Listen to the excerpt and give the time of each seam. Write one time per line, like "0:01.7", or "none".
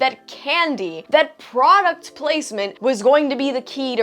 0:01.0
0:02.7